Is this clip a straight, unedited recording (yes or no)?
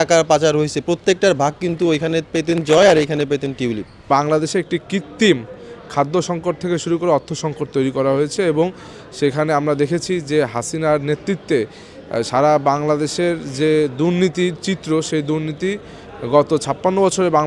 no